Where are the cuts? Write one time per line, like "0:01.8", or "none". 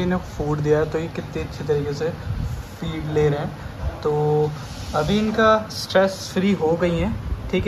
none